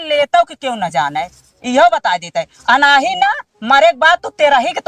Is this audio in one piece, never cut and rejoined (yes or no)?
yes